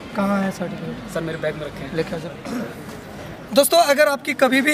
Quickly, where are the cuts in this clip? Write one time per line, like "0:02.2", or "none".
0:02.2
0:03.3